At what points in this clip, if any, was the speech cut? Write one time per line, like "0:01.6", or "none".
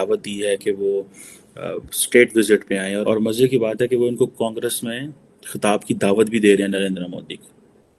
0:03.0